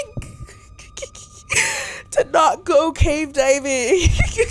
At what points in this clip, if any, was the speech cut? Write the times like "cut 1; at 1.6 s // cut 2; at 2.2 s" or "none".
none